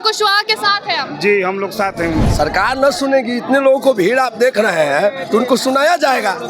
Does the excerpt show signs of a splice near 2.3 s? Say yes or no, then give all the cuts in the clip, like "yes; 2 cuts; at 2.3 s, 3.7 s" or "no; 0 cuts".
yes; 1 cut; at 2.3 s